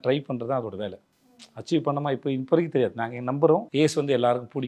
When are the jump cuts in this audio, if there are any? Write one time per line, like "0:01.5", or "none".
0:03.7